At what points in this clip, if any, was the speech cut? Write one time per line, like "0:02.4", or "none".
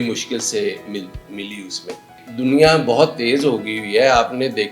0:02.2